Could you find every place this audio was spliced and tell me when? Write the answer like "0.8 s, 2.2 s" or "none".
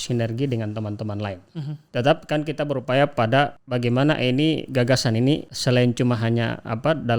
1.8 s, 3.6 s, 5.5 s